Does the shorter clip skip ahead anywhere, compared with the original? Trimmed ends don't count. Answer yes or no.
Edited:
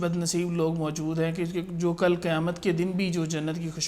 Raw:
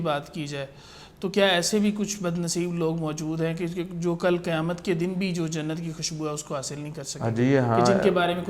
no